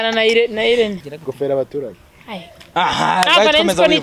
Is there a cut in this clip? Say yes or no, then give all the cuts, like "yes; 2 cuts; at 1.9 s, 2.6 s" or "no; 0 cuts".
no; 0 cuts